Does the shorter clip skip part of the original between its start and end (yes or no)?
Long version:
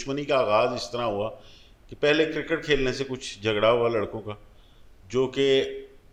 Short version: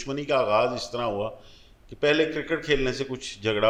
no